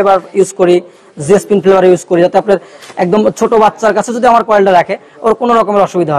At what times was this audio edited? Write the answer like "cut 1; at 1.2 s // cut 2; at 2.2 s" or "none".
none

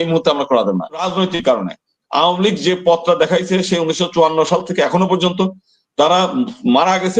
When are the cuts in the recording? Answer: cut 1; at 1.1 s

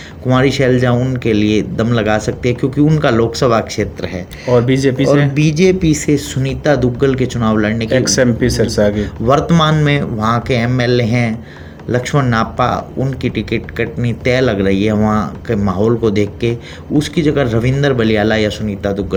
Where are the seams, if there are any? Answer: none

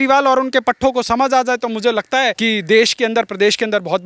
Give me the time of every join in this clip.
cut 1; at 2.4 s

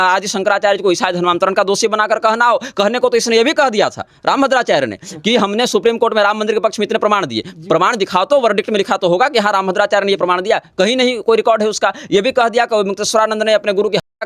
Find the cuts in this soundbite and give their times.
none

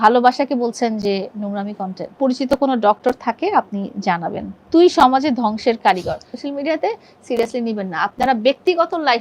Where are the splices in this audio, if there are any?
cut 1; at 2.2 s // cut 2; at 4.5 s // cut 3; at 6.3 s

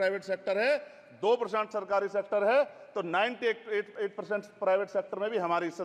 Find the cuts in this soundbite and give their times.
none

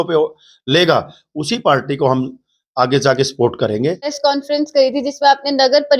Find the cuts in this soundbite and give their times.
cut 1; at 4.1 s

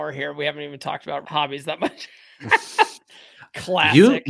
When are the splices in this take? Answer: cut 1; at 1.2 s

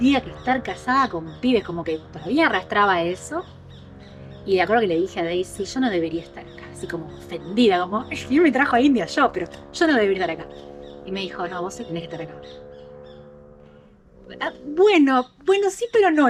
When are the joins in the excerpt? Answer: none

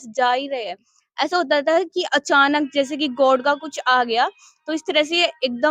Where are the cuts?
none

